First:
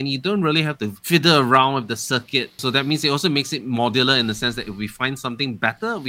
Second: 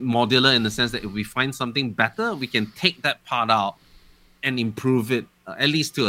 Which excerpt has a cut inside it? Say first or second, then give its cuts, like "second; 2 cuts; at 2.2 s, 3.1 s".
first; 2 cuts; at 1.0 s, 2.6 s